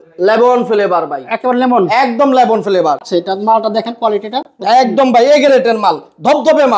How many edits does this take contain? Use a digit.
1